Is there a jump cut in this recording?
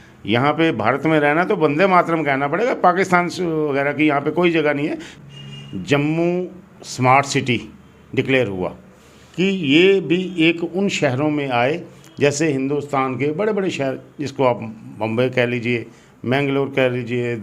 yes; 1 cut; at 5.2 s

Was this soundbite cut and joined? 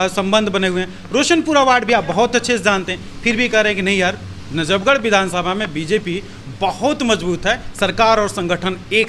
no; 0 cuts

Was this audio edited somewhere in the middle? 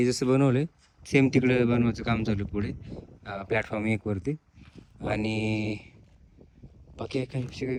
no; 0 cuts

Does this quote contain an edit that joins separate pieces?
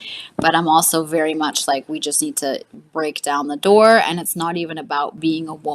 no; 0 cuts

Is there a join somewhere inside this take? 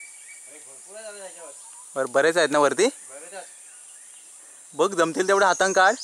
no; 0 cuts

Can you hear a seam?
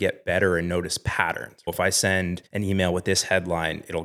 yes; 2 cuts; at 1.7 s, 2.4 s

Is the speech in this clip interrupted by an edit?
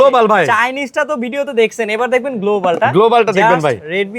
no; 0 cuts

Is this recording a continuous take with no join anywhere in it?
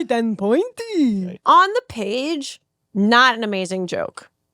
no; 1 cut; at 1.3 s

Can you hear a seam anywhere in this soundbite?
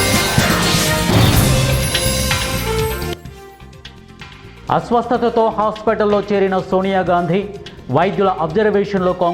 no; 0 cuts

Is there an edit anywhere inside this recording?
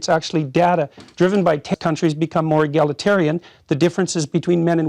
yes; 1 cut; at 1.7 s

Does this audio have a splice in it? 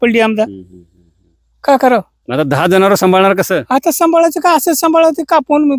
no; 0 cuts

